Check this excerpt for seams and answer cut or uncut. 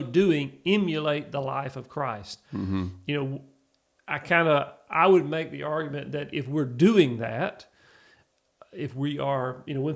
uncut